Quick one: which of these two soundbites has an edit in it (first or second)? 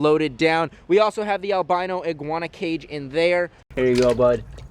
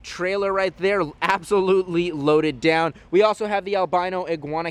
first